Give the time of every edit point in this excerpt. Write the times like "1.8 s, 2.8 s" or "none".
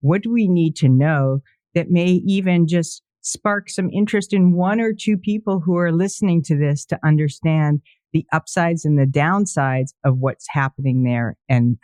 none